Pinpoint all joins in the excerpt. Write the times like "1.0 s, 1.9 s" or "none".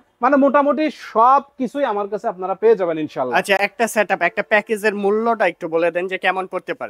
none